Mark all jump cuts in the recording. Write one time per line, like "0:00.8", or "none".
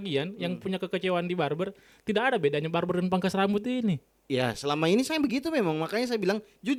none